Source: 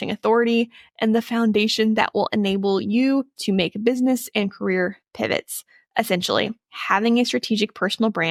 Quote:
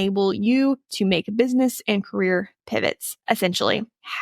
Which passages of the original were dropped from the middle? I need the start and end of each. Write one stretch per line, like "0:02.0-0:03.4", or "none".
0:05.6-0:05.8